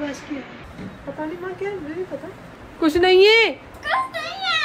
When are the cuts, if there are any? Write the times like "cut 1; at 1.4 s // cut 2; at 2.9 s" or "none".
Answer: cut 1; at 2.4 s